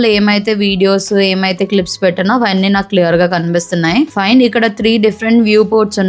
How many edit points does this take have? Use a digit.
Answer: 0